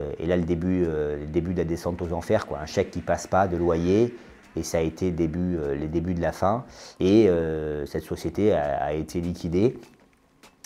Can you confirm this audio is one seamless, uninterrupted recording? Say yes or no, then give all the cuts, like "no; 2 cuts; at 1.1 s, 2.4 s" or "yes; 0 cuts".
yes; 0 cuts